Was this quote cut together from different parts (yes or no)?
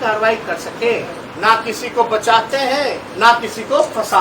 yes